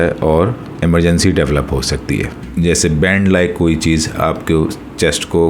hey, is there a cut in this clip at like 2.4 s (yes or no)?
yes